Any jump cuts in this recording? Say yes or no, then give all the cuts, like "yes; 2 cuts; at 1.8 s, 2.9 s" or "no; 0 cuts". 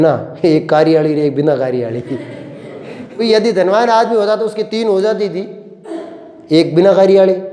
yes; 1 cut; at 3.2 s